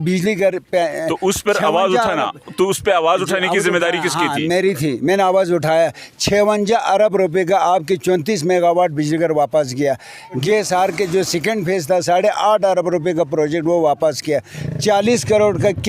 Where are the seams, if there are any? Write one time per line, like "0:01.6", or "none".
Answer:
0:10.4
0:14.6